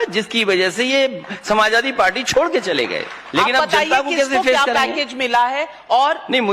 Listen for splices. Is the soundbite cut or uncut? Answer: cut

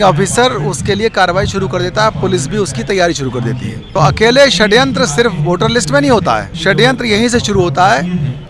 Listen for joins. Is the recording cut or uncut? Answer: cut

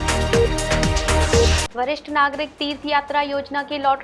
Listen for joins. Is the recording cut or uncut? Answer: cut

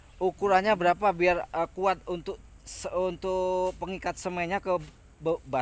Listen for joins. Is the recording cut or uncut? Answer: uncut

